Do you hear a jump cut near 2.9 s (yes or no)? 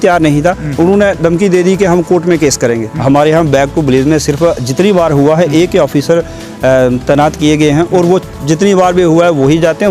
yes